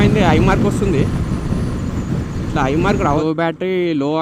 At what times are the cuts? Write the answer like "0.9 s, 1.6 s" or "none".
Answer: 3.1 s

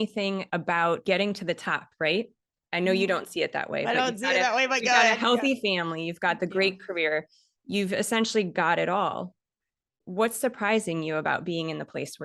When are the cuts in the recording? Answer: 1.0 s

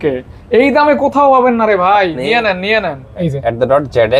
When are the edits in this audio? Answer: 3.2 s

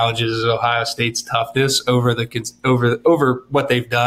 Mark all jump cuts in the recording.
none

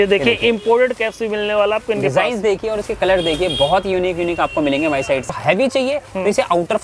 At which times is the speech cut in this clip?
5.3 s

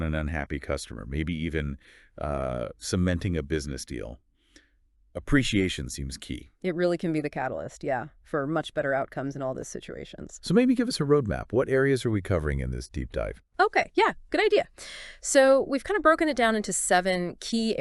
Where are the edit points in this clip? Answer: 10.8 s

